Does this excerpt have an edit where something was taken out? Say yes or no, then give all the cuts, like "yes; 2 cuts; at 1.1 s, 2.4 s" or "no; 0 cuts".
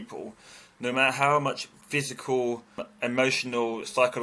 yes; 1 cut; at 2.9 s